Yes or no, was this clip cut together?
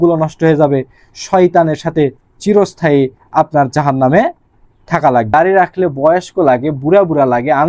yes